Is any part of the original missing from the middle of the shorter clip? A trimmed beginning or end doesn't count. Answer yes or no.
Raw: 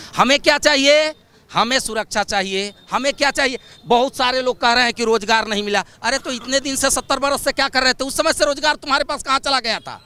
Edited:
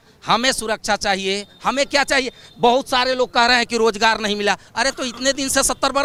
no